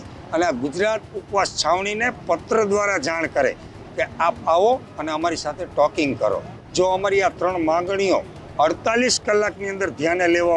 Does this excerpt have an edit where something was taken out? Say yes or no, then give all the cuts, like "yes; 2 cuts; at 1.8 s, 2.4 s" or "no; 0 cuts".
yes; 1 cut; at 6.6 s